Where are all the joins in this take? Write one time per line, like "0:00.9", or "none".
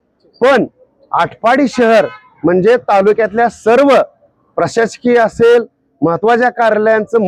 none

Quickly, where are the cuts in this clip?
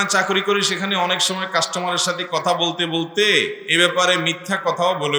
0:03.6

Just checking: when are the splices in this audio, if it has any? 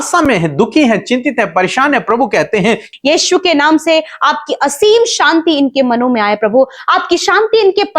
0:02.9

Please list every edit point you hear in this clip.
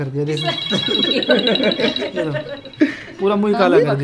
none

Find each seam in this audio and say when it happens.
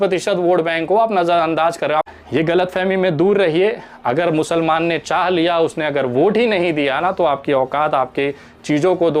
0:02.1

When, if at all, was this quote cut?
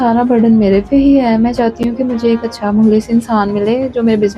none

